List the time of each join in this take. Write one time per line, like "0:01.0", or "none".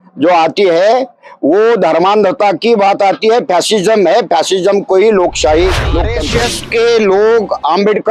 0:06.2